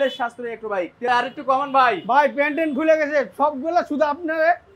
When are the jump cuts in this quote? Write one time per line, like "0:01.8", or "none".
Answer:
0:01.0